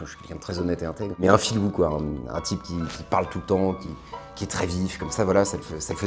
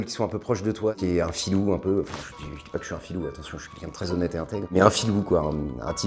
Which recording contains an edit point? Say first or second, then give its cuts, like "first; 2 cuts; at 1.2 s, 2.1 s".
second; 1 cut; at 1.0 s